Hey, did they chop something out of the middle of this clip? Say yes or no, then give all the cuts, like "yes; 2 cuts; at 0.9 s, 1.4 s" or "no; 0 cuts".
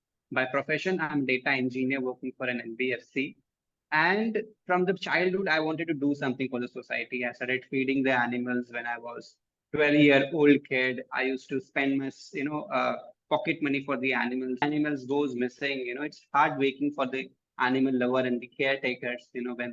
yes; 1 cut; at 14.6 s